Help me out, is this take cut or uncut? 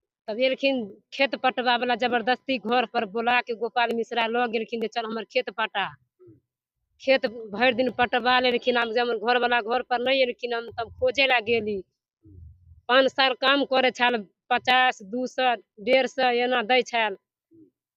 uncut